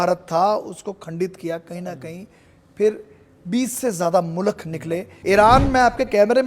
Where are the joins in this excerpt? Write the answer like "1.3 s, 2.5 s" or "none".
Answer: 5.1 s